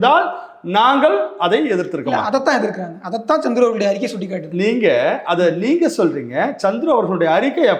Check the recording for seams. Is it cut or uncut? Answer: uncut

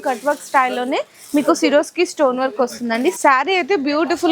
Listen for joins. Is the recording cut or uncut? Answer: cut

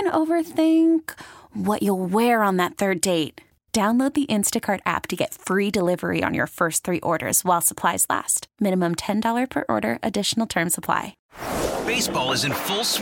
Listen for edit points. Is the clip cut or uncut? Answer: cut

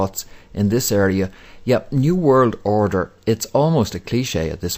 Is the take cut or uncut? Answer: cut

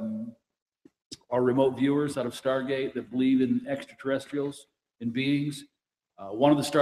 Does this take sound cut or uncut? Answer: cut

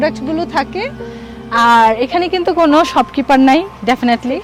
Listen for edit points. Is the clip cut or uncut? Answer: uncut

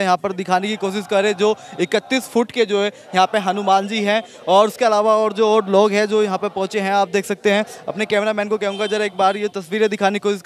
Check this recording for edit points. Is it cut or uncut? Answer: uncut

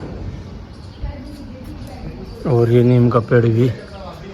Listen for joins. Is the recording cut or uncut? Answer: uncut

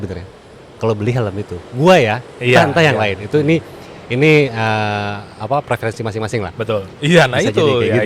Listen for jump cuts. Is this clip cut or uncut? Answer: cut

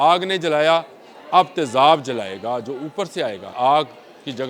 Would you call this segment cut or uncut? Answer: cut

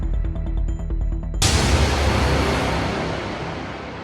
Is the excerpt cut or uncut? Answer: cut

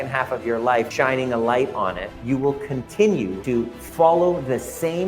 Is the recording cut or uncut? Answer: cut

